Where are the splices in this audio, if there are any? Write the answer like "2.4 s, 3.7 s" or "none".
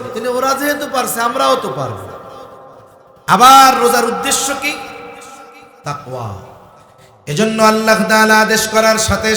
6.7 s

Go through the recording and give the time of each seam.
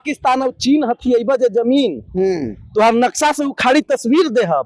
none

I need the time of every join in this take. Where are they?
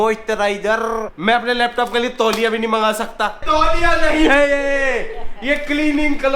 1.1 s, 3.4 s

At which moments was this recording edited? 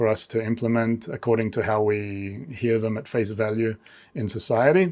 none

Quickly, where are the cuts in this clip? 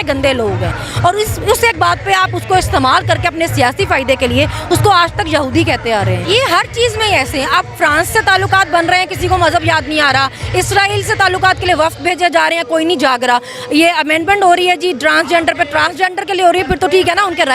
6.2 s

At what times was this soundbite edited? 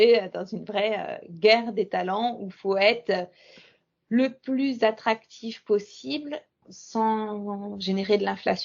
6.7 s

